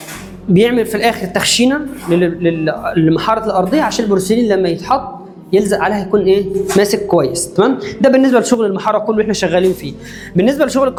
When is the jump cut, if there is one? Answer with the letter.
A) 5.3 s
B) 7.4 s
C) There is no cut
C